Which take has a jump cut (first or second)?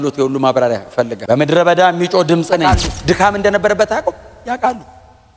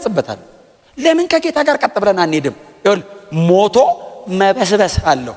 first